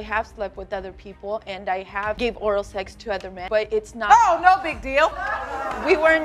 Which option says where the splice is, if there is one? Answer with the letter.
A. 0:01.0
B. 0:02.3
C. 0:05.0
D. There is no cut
D